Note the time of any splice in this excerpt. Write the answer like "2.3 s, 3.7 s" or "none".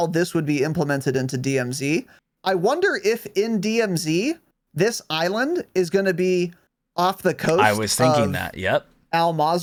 none

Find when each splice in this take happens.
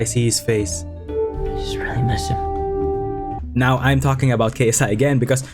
3.4 s

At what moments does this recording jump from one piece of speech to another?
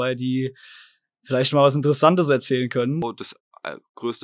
3.0 s

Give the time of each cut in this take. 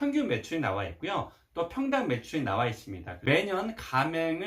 3.2 s

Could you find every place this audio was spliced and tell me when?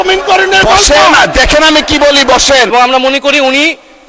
2.7 s

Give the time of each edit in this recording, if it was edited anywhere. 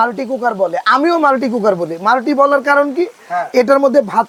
none

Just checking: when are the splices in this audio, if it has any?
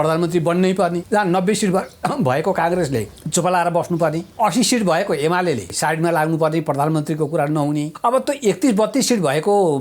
1.0 s, 3.2 s, 4.2 s, 5.7 s, 7.9 s

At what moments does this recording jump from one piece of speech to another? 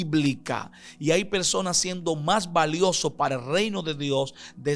none

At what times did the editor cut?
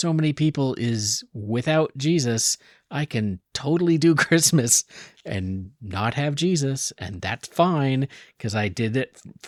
none

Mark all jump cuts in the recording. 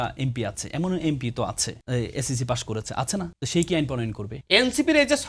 1.7 s, 3.4 s, 4.3 s

